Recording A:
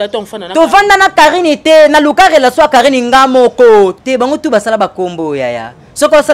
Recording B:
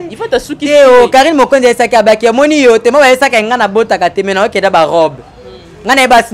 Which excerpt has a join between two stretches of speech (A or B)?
A